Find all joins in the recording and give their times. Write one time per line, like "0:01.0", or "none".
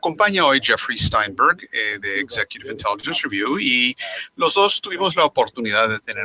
0:01.1

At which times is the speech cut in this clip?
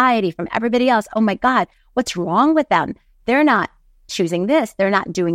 none

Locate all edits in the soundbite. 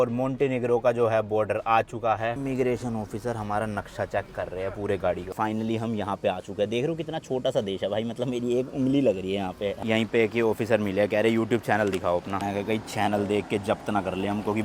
0:02.4
0:05.3
0:09.8

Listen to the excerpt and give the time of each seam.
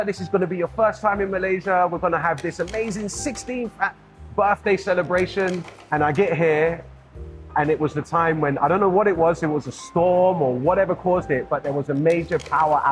0:05.7

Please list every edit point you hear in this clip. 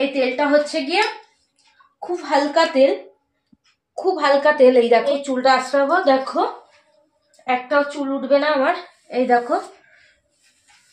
0:05.1

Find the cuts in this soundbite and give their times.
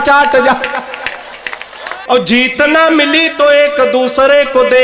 0:01.9

